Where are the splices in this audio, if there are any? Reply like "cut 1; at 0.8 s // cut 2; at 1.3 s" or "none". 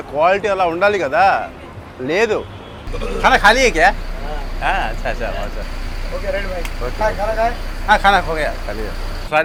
none